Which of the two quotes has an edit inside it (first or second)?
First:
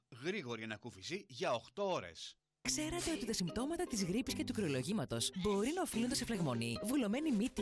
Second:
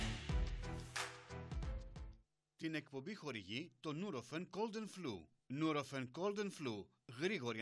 second